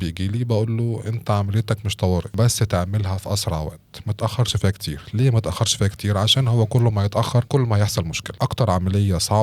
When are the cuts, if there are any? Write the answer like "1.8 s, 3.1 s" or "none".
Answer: 2.3 s, 7.5 s, 8.2 s